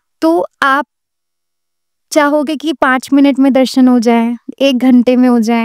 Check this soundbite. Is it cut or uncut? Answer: uncut